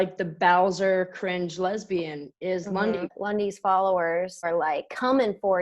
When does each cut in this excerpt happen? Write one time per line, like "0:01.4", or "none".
0:03.2
0:04.5